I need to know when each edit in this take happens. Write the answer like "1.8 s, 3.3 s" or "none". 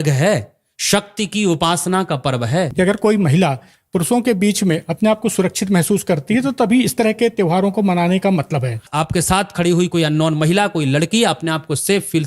2.7 s, 8.8 s